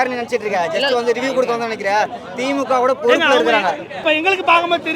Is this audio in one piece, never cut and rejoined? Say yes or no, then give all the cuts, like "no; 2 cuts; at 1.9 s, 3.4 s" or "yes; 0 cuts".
no; 1 cut; at 4.0 s